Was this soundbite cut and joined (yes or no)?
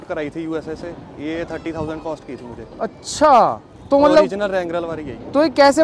no